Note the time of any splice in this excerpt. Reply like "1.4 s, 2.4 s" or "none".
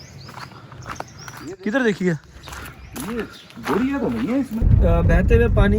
4.7 s

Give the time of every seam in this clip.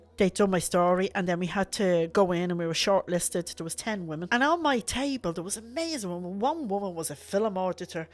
4.2 s

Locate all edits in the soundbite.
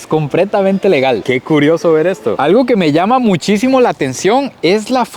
2.3 s

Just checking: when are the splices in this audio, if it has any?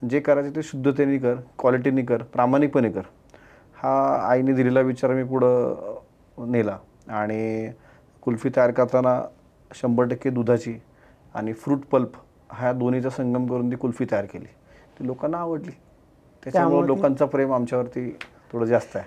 none

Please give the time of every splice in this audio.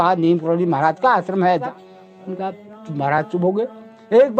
1.6 s

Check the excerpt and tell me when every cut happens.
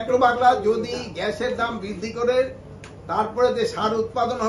none

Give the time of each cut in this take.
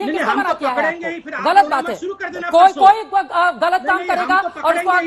none

